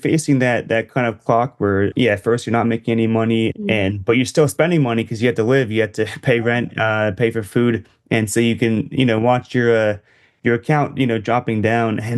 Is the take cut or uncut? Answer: cut